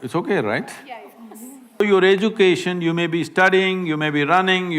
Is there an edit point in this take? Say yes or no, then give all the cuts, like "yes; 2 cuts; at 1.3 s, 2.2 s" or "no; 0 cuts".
yes; 1 cut; at 1.8 s